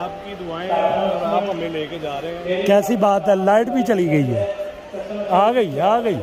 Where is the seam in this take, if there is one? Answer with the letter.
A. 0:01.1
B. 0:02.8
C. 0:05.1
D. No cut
D